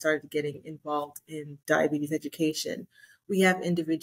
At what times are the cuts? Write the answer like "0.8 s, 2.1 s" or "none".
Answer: 1.5 s

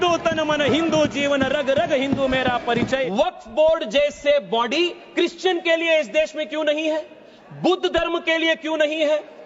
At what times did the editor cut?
3.3 s

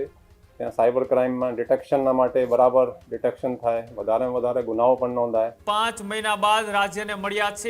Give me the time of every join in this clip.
5.6 s

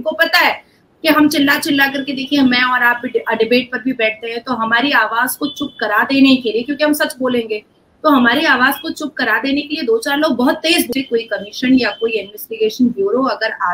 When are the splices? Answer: 10.9 s

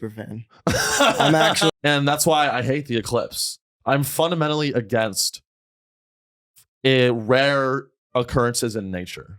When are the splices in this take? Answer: 1.7 s

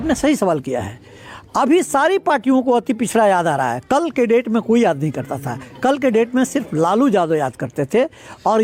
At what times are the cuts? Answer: none

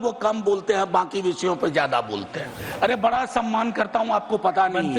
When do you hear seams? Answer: 2.6 s

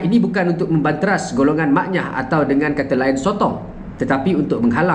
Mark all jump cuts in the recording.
none

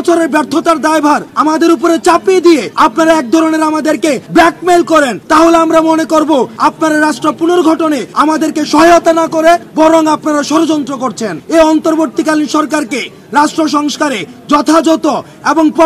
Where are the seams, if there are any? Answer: 1.3 s, 2.7 s, 4.2 s, 5.2 s, 6.5 s, 8.1 s, 9.7 s, 11.3 s

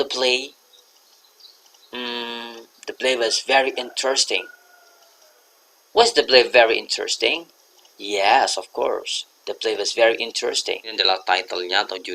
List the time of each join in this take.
11.0 s

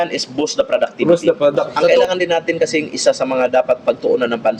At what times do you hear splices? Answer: 2.0 s

